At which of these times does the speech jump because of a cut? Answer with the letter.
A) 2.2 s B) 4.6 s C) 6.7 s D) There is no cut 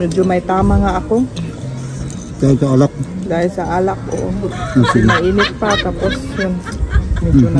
D